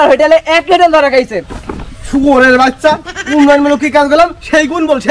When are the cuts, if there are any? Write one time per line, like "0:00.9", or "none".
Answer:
0:01.6